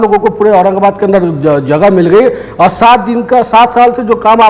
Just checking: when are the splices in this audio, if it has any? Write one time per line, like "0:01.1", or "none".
none